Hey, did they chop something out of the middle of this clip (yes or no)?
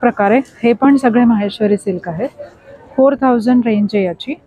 no